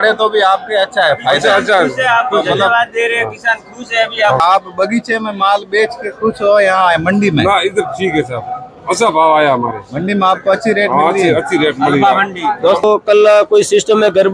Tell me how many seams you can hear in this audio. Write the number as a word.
two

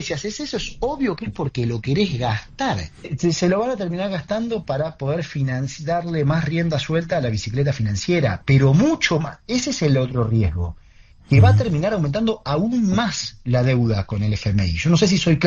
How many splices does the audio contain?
one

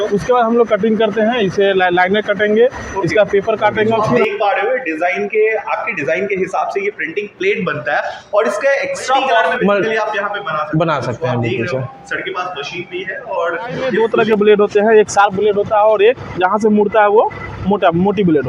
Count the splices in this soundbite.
three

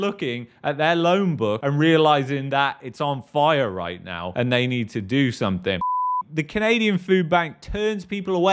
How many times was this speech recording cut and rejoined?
one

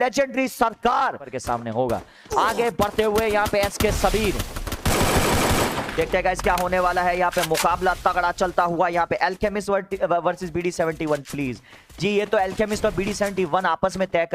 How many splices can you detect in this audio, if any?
one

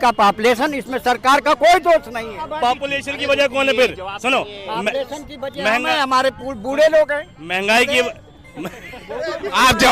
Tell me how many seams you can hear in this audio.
one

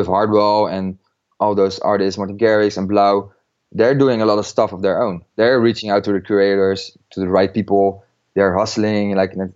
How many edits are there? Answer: one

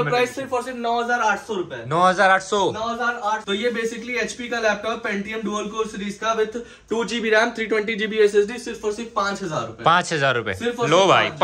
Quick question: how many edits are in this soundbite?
one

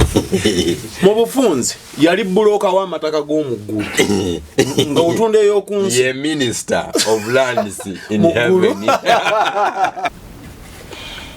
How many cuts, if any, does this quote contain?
one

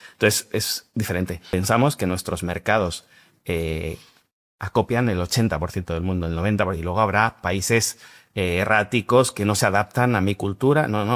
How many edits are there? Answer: one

